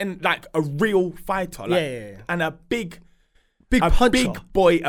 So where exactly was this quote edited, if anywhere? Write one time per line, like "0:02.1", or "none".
none